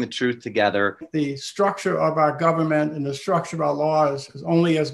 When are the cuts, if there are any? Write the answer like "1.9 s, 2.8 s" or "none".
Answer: 1.1 s